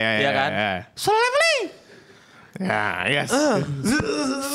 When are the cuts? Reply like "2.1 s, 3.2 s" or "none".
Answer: none